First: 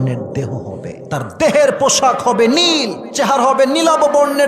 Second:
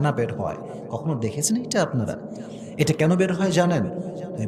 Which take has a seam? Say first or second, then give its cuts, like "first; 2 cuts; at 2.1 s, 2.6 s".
first; 2 cuts; at 1.0 s, 3.0 s